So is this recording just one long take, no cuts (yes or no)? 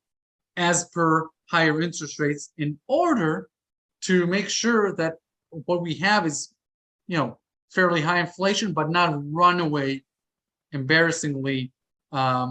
yes